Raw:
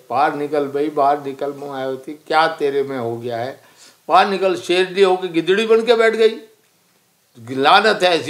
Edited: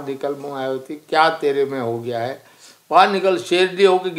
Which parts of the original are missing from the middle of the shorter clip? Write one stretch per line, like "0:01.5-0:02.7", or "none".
none